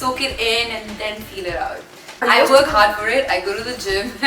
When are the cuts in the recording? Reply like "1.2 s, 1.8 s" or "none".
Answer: 2.2 s